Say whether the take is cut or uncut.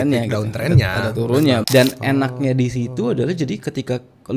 cut